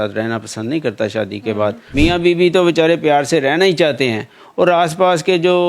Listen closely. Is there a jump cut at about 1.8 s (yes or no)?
yes